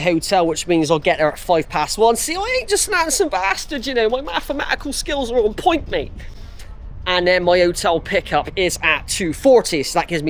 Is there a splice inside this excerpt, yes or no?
no